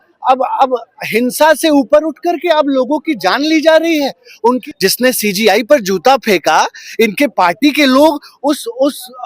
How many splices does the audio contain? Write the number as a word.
one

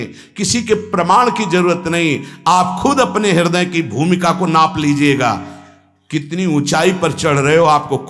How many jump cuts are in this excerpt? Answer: zero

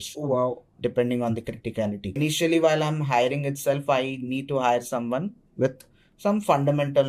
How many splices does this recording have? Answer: one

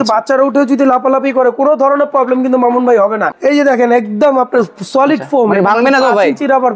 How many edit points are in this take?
one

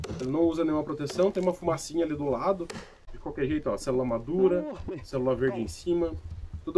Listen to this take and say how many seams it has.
one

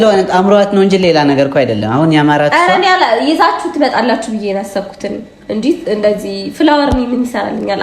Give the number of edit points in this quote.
zero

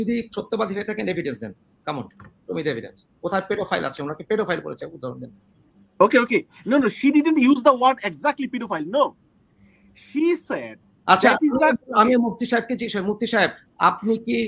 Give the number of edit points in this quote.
zero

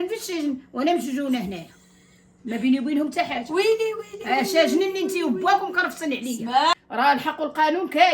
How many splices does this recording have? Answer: one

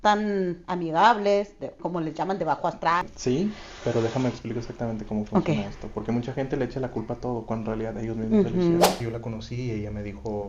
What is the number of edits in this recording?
two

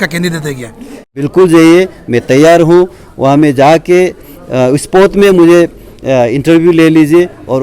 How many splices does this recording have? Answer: one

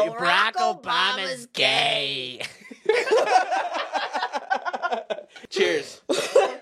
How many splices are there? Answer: one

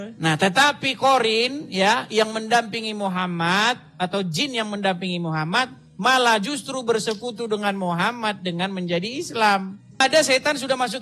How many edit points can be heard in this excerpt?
one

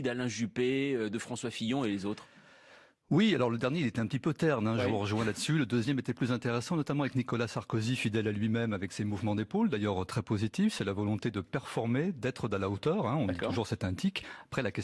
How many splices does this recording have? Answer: zero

